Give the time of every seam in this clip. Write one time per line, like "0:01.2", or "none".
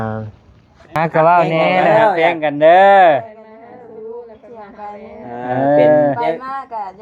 0:01.0

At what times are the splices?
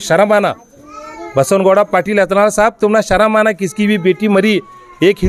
none

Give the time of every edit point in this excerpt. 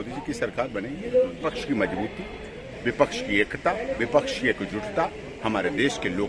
0:01.5

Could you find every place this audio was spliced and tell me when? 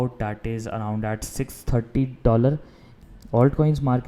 0:02.9

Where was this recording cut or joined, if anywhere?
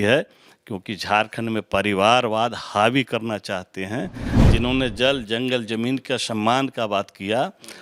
0:04.3

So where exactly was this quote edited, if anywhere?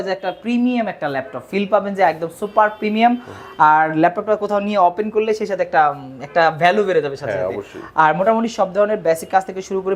none

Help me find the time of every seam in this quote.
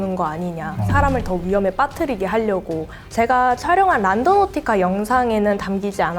0:03.0

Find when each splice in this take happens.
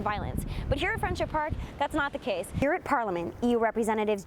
0:02.6

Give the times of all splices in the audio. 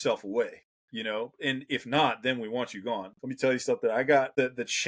0:03.1

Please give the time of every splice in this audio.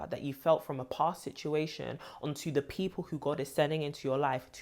none

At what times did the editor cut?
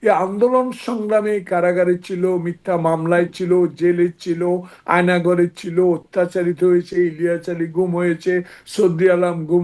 none

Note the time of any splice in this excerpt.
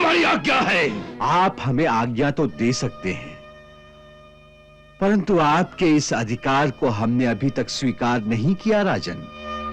0:01.1

